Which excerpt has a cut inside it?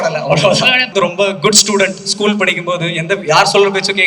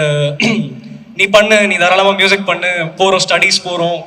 first; 1 cut; at 0.9 s

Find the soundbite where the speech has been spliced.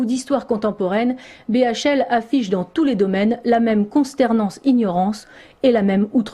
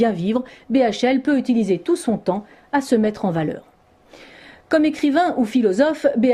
first; 1 cut; at 3.9 s

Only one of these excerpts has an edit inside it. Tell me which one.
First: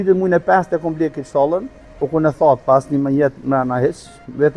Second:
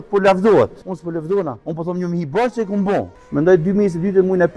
second; 2 cuts; at 1.4 s, 3.2 s

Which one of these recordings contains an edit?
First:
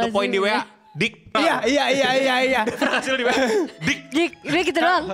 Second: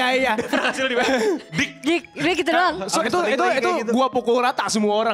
first; 1 cut; at 1.3 s

